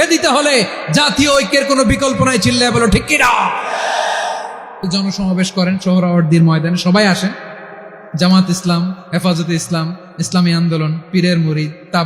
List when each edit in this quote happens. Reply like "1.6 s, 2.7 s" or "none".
4.9 s

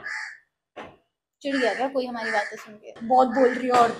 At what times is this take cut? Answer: 2.9 s

